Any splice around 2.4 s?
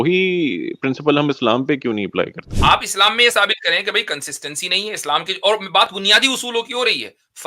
yes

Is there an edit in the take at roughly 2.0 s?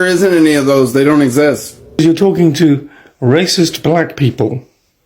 yes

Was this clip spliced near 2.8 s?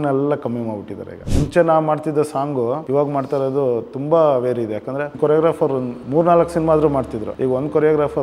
yes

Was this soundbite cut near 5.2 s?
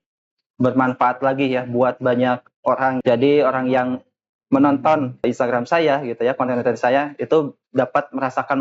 yes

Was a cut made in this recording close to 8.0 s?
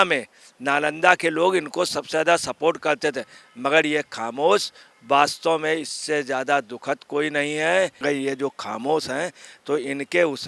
yes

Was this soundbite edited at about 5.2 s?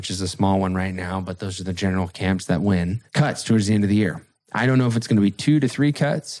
no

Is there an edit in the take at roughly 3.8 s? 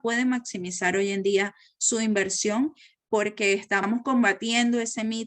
yes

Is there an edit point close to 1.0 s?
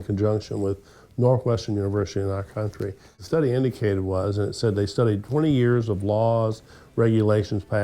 no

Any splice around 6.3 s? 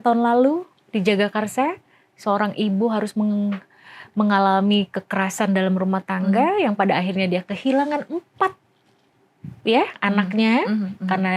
no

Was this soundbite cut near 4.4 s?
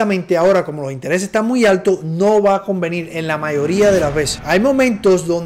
yes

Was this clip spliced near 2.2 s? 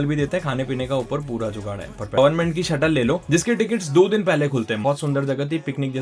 yes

